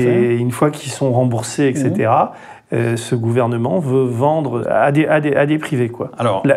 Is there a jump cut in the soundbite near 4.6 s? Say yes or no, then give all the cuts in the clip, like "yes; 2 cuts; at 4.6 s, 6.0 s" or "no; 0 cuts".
yes; 1 cut; at 4.6 s